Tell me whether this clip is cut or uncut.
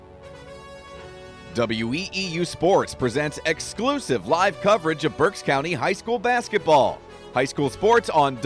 cut